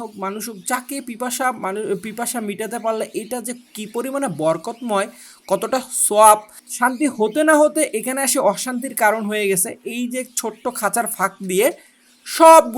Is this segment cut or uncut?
cut